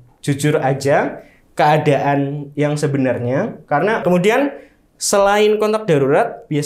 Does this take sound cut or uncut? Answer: cut